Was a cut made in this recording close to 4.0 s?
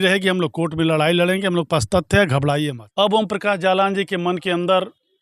no; 1 cut; at 2.8 s

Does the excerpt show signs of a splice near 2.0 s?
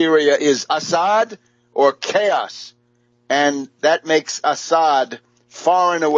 yes; 1 cut; at 2.0 s

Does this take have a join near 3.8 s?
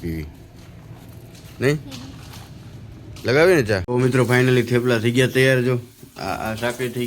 yes; 1 cut; at 3.8 s

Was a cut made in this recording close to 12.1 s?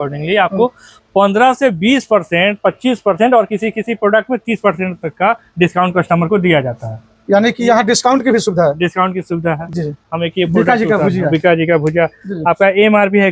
no; 1 cut; at 10.0 s

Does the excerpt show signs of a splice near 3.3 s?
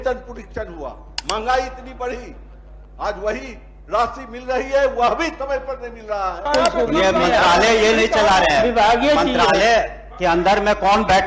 no; 1 cut; at 6.4 s

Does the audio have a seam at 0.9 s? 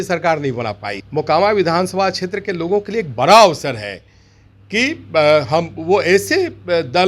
yes; 1 cut; at 0.9 s

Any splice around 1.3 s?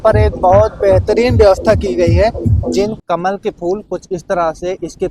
no; 1 cut; at 3.0 s

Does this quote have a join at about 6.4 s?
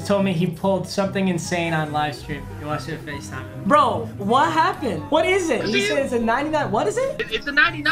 no; 1 cut; at 5.0 s

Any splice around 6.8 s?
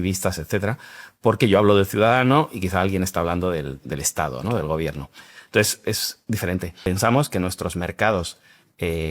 yes; 1 cut; at 6.8 s

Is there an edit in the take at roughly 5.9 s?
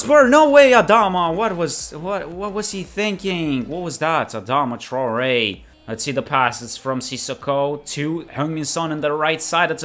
yes; 1 cut; at 5.9 s

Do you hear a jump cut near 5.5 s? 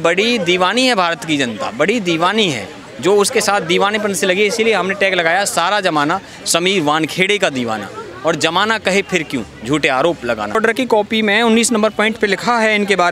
no; 1 cut; at 10.6 s

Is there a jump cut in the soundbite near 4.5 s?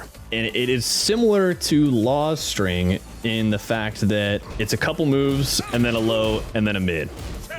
yes; 1 cut; at 4.5 s

